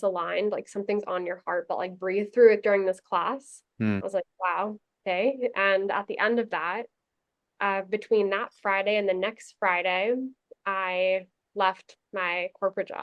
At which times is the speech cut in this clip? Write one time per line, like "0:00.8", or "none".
none